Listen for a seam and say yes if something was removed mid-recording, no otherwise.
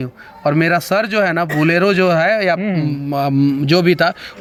no